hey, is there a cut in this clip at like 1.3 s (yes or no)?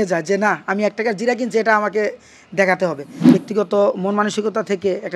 no